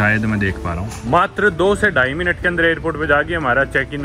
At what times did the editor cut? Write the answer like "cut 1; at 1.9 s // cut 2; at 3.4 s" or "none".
cut 1; at 0.9 s